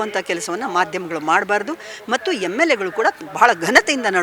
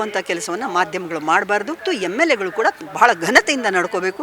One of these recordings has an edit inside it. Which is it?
second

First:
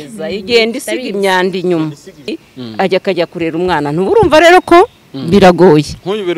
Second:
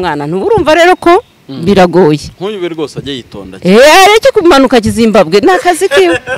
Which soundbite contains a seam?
first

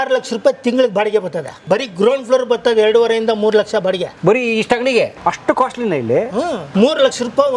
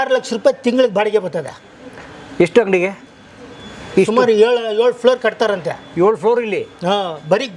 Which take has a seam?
first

